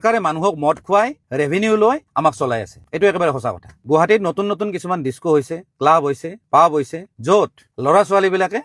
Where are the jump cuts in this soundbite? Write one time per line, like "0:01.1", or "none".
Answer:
0:03.7